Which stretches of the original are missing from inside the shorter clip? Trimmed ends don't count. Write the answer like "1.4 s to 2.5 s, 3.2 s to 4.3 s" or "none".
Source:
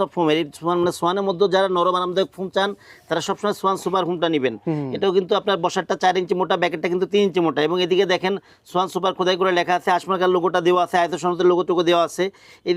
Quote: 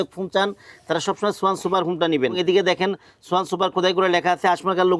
4.6 s to 7.8 s